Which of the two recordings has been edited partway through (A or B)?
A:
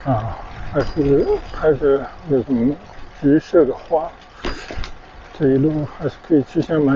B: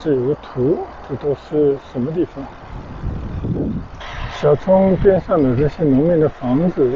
B